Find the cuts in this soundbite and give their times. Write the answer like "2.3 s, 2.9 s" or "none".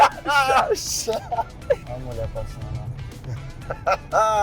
1.8 s